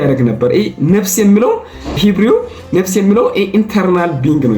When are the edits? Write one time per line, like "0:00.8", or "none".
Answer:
0:02.0